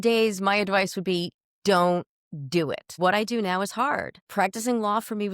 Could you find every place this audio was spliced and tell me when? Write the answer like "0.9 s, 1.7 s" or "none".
2.9 s, 4.2 s